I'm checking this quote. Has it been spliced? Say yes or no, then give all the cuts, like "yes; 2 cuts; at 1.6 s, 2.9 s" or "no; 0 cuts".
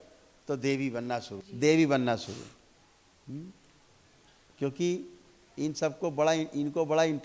yes; 1 cut; at 1.4 s